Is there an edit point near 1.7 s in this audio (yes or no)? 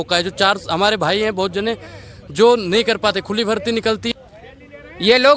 no